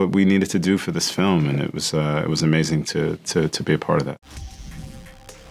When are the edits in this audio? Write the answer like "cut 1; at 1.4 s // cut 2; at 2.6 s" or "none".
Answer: cut 1; at 4.2 s

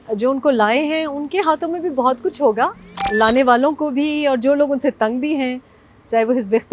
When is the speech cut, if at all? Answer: cut 1; at 3.0 s

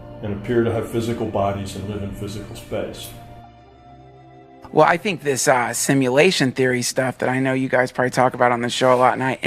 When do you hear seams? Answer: cut 1; at 6.4 s

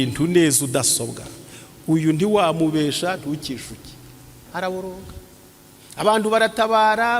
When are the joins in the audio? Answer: cut 1; at 4.3 s

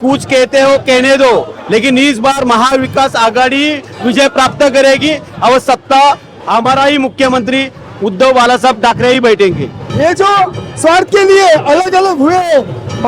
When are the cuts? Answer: cut 1; at 9.8 s

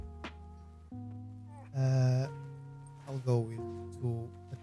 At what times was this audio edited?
none

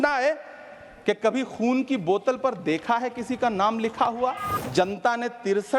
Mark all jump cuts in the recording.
cut 1; at 4.5 s

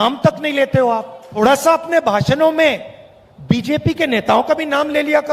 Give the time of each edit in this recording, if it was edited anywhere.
cut 1; at 1.2 s

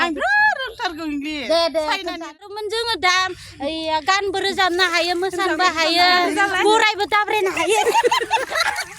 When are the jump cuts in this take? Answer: cut 1; at 2.3 s

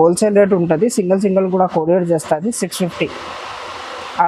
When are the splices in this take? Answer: none

